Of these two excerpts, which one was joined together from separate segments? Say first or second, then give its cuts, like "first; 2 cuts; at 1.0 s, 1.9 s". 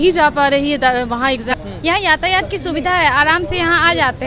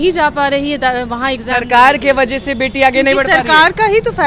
first; 1 cut; at 1.5 s